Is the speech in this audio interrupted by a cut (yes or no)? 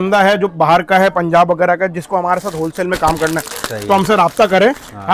no